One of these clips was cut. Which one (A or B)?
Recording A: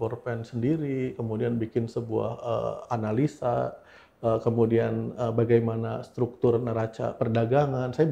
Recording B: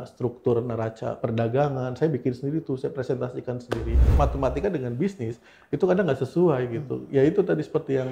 B